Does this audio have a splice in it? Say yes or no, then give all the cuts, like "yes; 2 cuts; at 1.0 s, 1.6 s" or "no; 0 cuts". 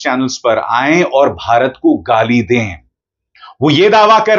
no; 0 cuts